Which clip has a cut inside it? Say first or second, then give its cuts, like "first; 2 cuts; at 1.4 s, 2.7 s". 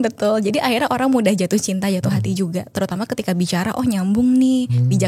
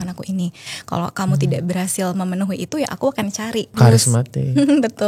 second; 1 cut; at 3.7 s